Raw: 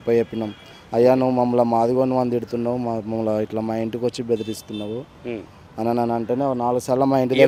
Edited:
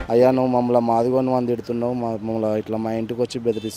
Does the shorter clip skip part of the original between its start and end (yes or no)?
no